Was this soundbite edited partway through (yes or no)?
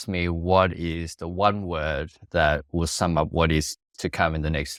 no